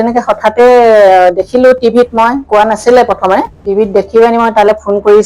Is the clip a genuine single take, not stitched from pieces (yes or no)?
no